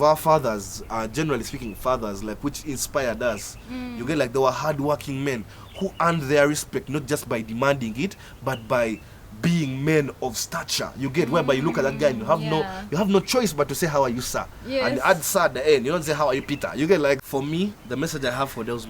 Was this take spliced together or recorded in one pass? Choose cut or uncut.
cut